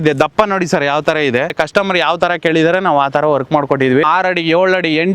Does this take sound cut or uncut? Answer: cut